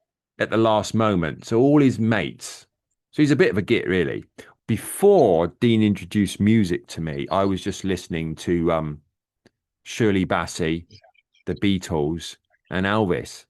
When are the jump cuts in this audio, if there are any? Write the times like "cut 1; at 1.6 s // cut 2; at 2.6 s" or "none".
cut 1; at 4.5 s

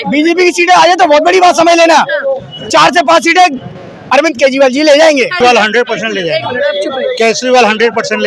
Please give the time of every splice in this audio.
cut 1; at 5.4 s

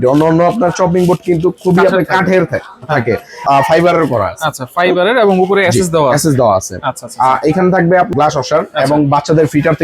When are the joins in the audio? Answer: cut 1; at 3.4 s // cut 2; at 8.1 s

